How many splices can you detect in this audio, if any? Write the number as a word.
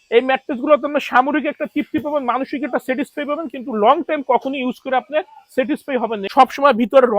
one